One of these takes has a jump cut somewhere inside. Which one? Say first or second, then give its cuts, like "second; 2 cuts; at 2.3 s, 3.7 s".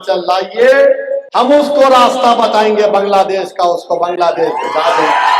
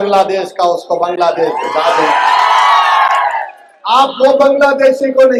first; 1 cut; at 1.2 s